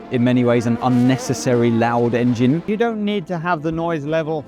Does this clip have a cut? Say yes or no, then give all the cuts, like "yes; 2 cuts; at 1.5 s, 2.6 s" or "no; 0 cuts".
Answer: yes; 1 cut; at 2.6 s